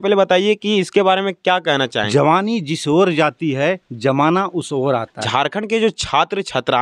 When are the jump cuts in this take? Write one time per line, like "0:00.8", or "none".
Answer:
0:02.1
0:05.2